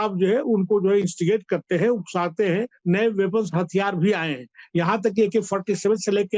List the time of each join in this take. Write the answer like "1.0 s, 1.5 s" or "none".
2.7 s